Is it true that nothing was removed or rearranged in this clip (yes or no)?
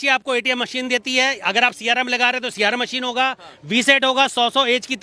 yes